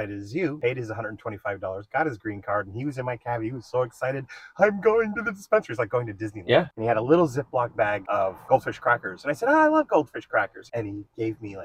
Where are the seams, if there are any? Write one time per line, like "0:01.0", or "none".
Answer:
0:06.7
0:08.3
0:10.6